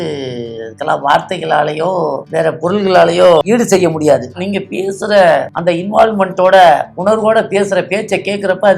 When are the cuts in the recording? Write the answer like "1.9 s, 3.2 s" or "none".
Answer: 2.2 s, 3.4 s, 4.4 s, 5.5 s, 6.9 s

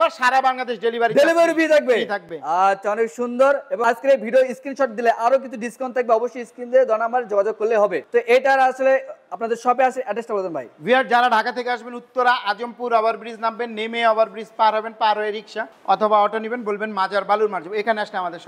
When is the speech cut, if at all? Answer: none

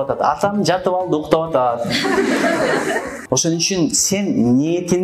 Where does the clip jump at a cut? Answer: 3.1 s

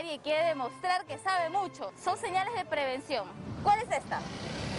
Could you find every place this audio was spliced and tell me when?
2.0 s, 3.5 s

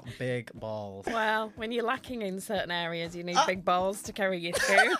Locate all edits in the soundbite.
1.0 s

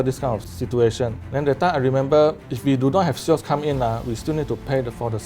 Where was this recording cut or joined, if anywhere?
1.2 s, 2.5 s

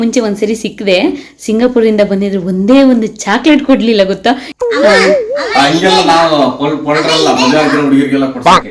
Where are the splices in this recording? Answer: 4.5 s

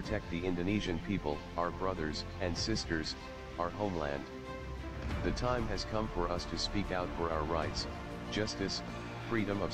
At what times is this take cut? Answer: none

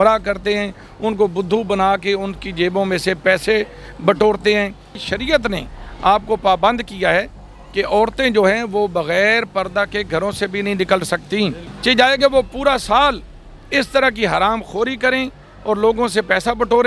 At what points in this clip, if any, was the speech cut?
4.9 s, 11.7 s

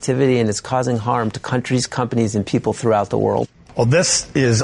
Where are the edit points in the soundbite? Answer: 3.6 s

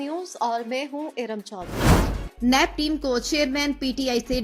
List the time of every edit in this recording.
1.7 s

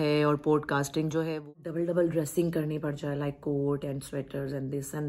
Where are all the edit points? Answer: 1.5 s

